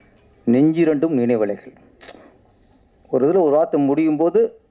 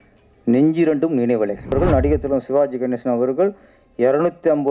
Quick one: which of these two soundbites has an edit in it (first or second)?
second